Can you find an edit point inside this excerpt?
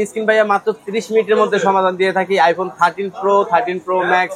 no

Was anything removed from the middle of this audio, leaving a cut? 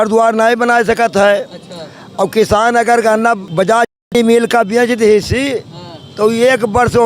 yes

